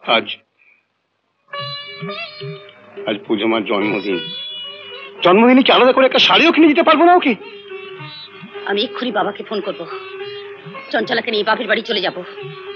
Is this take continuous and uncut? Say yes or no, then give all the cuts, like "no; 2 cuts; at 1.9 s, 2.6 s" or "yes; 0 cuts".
yes; 0 cuts